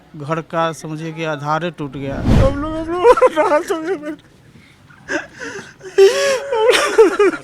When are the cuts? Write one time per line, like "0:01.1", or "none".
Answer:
0:02.3